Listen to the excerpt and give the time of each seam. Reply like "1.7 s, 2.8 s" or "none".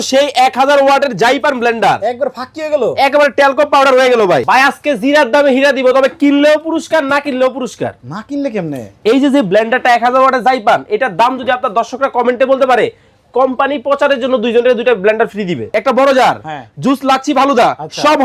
4.4 s, 15.8 s